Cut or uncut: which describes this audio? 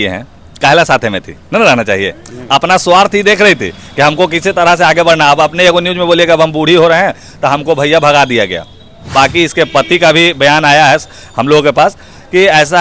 cut